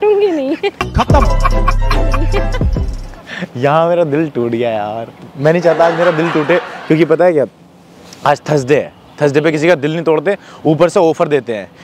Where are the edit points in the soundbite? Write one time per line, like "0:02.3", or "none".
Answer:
none